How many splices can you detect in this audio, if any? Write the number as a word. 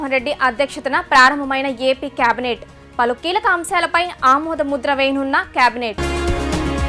one